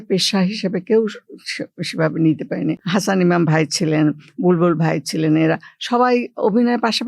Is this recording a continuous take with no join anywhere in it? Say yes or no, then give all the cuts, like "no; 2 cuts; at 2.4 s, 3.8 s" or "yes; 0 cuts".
yes; 0 cuts